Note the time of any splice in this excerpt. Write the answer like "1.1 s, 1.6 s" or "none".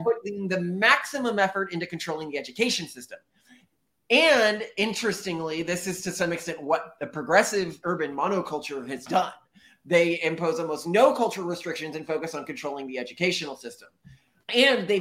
none